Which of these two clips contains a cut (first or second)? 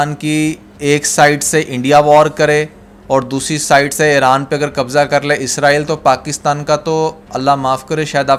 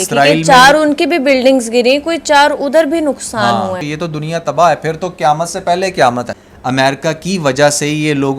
second